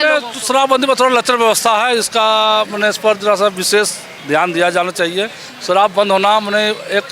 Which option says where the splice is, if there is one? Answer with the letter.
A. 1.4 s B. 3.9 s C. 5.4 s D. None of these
D